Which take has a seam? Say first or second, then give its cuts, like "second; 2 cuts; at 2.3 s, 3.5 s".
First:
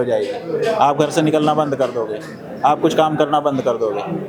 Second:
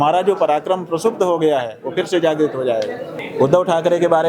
second; 1 cut; at 3.1 s